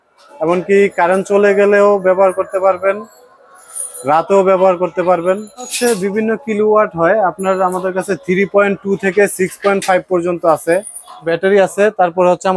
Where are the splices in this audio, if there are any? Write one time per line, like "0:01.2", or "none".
0:05.7
0:11.2